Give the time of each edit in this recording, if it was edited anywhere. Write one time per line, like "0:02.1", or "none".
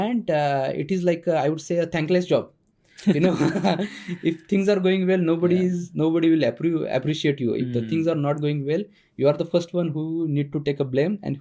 none